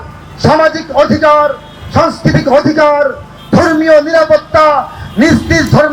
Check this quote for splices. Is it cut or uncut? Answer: uncut